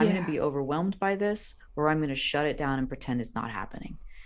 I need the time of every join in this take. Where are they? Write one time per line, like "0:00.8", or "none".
none